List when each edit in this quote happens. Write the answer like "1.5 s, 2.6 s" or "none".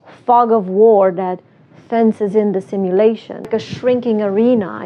3.5 s